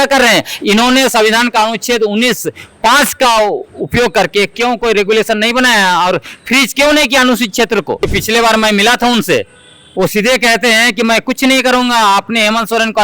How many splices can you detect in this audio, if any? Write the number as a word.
one